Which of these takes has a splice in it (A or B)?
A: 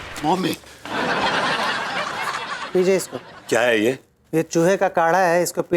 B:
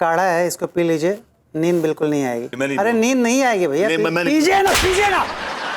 B